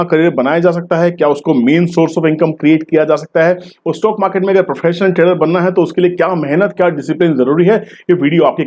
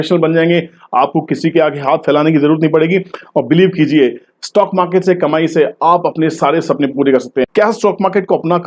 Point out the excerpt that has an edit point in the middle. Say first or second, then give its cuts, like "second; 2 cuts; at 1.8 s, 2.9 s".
second; 1 cut; at 7.5 s